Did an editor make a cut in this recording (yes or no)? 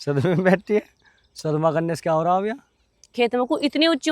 yes